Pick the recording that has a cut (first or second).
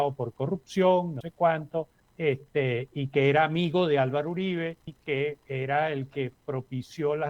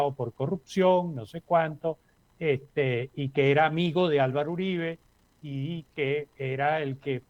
first